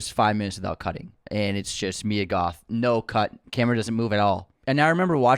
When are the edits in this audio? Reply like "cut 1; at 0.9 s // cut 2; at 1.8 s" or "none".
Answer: cut 1; at 1.1 s // cut 2; at 4.5 s